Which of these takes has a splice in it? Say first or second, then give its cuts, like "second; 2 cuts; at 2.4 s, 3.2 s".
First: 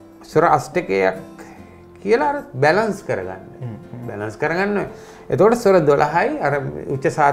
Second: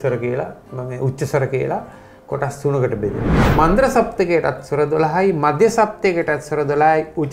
second; 1 cut; at 3.3 s